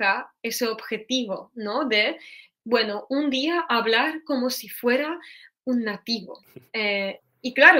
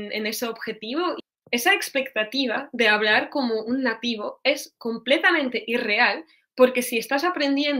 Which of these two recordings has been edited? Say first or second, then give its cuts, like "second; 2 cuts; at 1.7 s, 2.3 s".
second; 1 cut; at 1.3 s